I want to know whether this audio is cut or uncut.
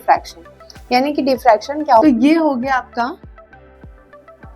cut